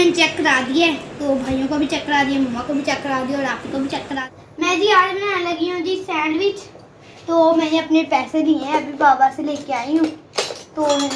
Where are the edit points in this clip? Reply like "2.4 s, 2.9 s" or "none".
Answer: 4.2 s